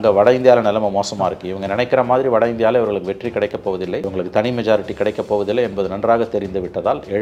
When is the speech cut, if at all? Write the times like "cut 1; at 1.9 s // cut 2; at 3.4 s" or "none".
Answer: cut 1; at 4.1 s